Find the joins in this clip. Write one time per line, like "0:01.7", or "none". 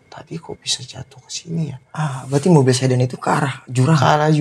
none